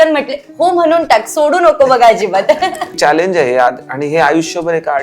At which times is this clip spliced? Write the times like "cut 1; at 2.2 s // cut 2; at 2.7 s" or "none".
cut 1; at 3.0 s